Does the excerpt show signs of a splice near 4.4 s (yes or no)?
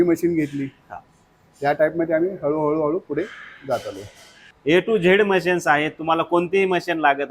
yes